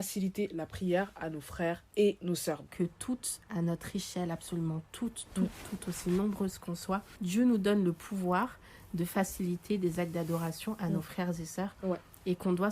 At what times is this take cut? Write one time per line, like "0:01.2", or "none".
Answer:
0:02.7
0:07.1

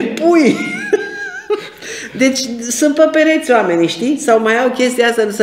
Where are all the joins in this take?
none

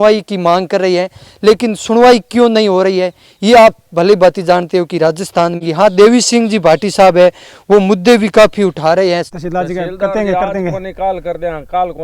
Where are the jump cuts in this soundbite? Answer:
0:05.6
0:09.3

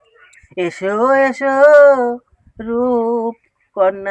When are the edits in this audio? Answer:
none

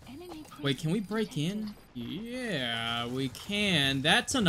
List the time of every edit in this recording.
0:01.8

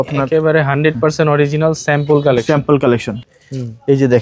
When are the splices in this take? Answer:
0:03.2

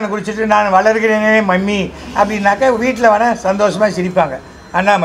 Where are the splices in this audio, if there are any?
none

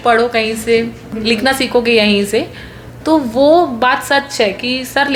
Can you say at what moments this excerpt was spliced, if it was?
none

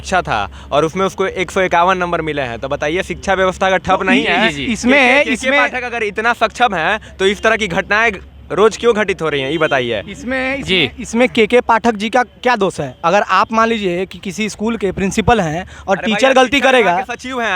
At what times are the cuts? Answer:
none

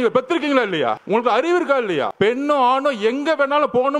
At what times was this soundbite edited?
0:01.0
0:02.1

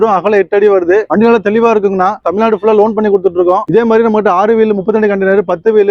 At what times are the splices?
0:01.1
0:02.2
0:03.6

